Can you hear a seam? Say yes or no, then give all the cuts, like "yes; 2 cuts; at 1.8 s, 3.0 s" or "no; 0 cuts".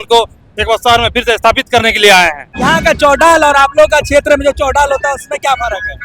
yes; 1 cut; at 2.5 s